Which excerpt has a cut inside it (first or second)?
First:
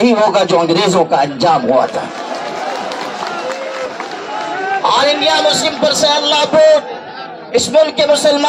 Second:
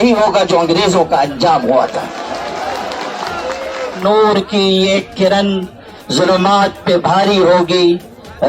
second